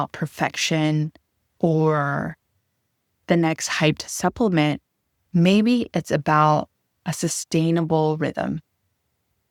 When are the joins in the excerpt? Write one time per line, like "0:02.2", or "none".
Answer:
none